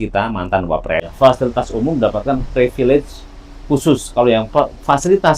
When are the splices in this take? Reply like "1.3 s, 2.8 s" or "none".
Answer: 1.1 s